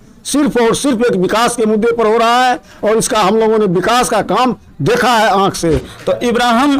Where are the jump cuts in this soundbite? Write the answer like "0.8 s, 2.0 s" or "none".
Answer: 5.9 s